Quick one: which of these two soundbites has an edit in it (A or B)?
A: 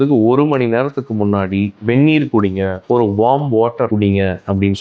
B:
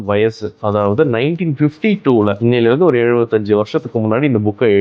A